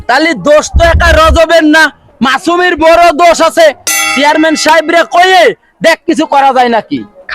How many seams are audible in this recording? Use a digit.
1